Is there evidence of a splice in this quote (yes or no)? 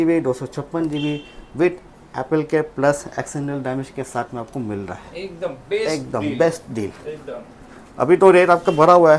no